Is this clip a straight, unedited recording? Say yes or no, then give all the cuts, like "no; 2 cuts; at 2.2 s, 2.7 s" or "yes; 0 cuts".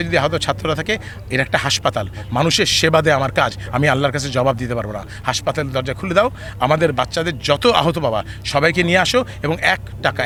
yes; 0 cuts